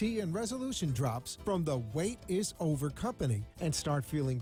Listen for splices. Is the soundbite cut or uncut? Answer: uncut